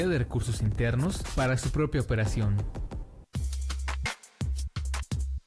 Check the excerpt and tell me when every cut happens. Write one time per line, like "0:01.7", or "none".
0:03.2